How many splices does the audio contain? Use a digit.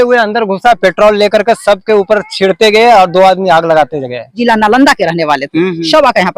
1